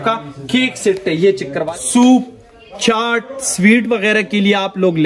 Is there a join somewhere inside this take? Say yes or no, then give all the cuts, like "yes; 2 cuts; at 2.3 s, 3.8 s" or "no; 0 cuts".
yes; 1 cut; at 1.5 s